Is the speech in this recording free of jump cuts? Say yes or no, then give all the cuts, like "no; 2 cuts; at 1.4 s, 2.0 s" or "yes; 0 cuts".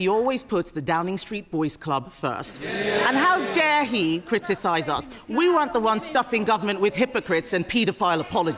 yes; 0 cuts